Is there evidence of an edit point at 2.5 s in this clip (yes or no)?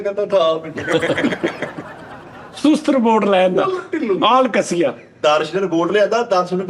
no